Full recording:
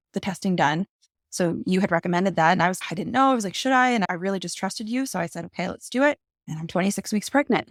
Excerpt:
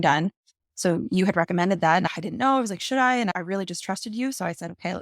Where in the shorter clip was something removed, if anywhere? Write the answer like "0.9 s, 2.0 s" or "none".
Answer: 2.0 s